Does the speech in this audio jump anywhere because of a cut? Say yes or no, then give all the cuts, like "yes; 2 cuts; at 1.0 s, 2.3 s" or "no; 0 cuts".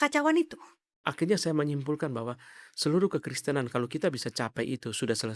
yes; 1 cut; at 1.0 s